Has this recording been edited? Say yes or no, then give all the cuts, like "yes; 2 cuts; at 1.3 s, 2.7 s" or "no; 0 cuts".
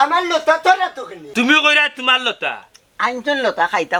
no; 0 cuts